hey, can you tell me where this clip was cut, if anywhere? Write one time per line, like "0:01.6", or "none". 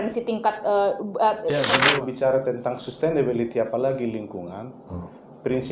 0:01.8